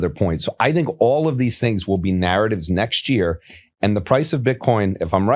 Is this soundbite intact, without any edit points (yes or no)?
yes